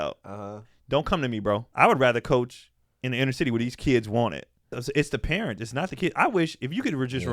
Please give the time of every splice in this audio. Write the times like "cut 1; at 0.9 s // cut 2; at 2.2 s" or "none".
cut 1; at 1.7 s // cut 2; at 4.8 s